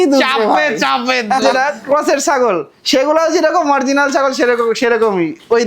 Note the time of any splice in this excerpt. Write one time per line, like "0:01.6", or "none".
0:01.5